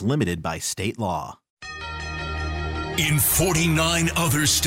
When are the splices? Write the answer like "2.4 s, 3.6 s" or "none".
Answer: 1.5 s